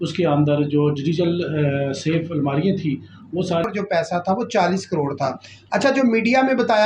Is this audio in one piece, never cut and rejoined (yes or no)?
no